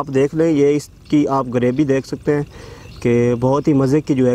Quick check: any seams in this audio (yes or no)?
no